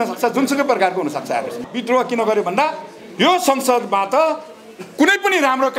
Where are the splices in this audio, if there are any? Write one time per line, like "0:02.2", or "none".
0:01.7